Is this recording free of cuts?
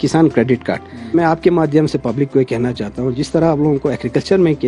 no; 1 cut; at 1.1 s

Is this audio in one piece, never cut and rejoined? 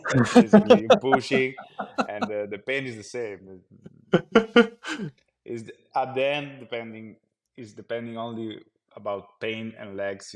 yes; 0 cuts

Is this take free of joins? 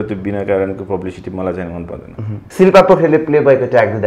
no; 1 cut; at 2.4 s

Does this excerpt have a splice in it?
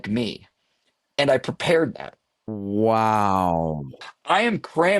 yes; 1 cut; at 4.0 s

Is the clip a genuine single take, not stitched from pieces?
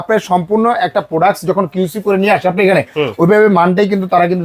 yes; 0 cuts

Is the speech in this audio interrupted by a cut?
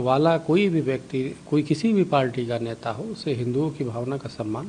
no; 0 cuts

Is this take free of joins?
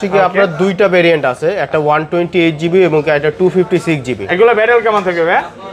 yes; 0 cuts

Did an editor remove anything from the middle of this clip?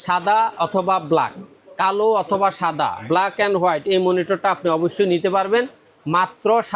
no; 0 cuts

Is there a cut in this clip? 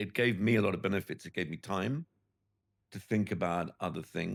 no; 0 cuts

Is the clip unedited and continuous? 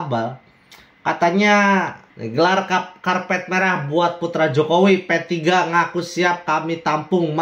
no; 1 cut; at 2.0 s

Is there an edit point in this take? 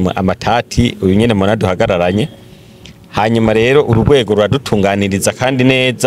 no; 0 cuts

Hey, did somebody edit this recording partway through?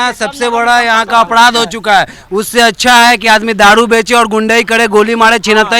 no; 0 cuts

